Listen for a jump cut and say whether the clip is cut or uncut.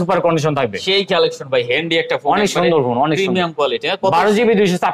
uncut